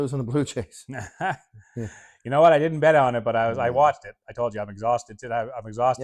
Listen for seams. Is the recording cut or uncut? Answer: uncut